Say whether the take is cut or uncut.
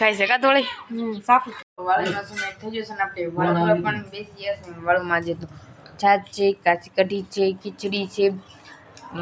cut